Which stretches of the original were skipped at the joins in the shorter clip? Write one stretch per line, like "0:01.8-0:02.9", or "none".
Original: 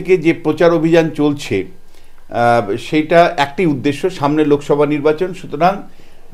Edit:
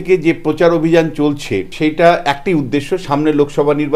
0:01.7-0:02.8